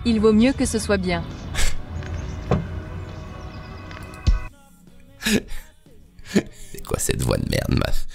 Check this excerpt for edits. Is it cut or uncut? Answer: uncut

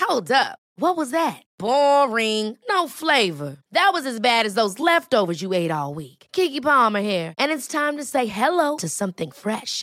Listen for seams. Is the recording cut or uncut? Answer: uncut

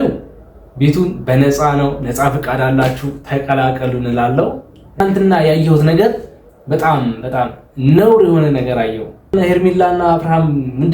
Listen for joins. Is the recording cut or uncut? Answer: cut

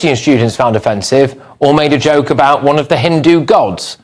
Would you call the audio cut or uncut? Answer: uncut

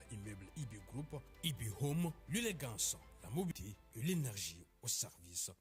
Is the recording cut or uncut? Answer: cut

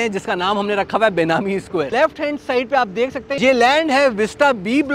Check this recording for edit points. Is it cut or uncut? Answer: cut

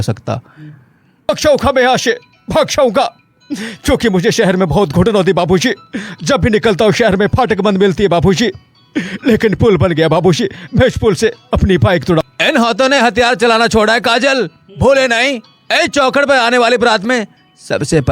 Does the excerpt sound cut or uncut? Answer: cut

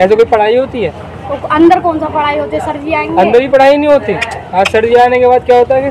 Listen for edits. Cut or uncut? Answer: uncut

